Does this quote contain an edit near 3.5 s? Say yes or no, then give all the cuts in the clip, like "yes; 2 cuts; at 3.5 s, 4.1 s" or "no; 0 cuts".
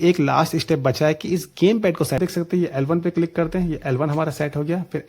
no; 1 cut; at 2.2 s